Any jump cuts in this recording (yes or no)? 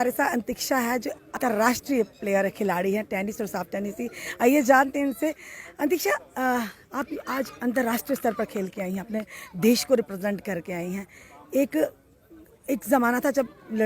yes